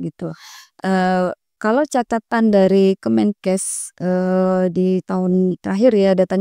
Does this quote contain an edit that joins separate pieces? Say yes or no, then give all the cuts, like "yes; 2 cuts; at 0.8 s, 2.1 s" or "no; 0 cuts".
yes; 1 cut; at 1.5 s